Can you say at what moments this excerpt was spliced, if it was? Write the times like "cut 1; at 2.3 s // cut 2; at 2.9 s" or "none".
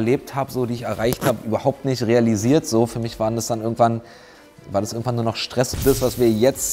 cut 1; at 5.7 s